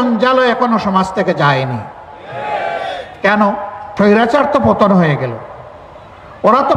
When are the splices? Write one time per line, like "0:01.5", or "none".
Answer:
0:03.8